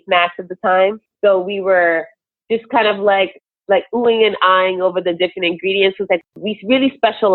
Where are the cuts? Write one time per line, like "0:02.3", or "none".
0:01.1
0:06.2